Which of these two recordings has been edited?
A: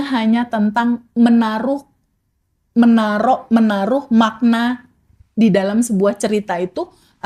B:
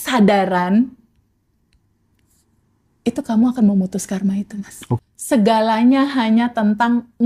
B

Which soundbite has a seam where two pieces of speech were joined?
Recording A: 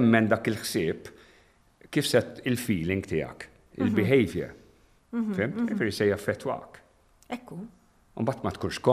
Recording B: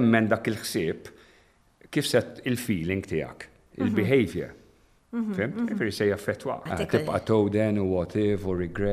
B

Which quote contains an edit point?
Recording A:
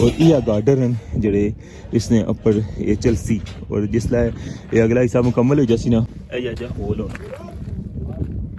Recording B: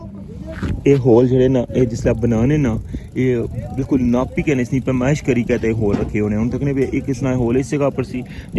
A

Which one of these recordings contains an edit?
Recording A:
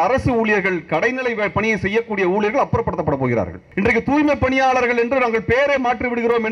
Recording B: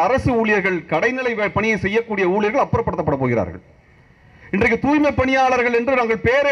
A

